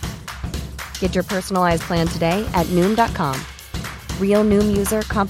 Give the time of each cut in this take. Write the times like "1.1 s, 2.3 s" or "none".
none